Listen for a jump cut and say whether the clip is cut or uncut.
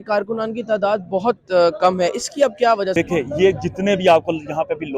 cut